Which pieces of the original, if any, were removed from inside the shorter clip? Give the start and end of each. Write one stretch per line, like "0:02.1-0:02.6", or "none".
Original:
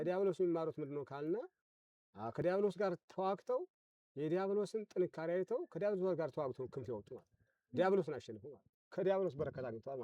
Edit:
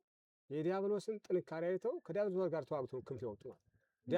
none

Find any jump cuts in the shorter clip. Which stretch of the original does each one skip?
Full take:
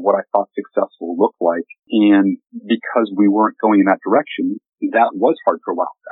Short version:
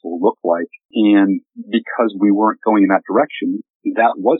none

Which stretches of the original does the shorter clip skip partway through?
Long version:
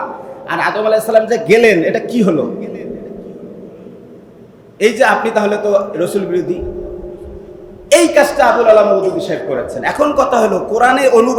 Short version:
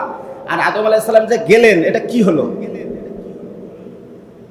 none

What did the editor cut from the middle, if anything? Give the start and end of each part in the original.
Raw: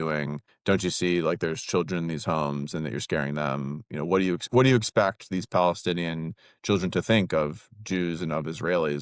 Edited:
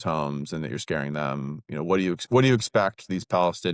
none

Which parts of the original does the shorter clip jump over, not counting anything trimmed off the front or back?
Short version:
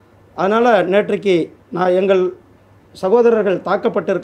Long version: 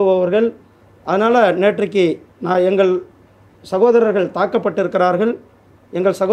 none

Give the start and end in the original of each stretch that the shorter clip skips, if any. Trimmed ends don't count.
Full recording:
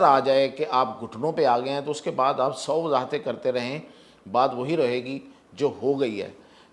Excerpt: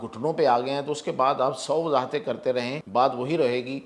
0:03.8-0:04.2

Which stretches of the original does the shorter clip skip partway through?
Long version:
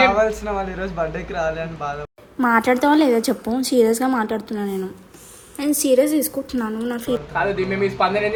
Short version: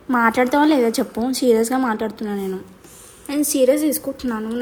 none

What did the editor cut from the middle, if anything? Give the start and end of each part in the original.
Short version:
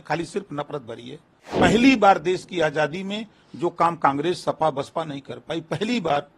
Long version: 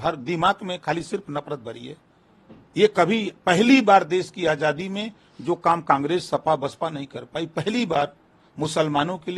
0:02.3-0:03.3

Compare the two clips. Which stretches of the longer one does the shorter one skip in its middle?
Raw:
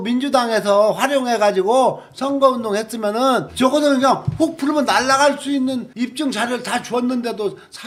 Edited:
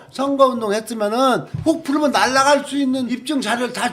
0:03.5-0:04.2
0:05.9-0:06.0

